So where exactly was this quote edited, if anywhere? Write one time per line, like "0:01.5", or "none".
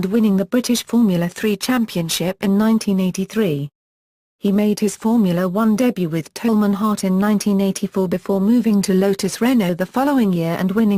none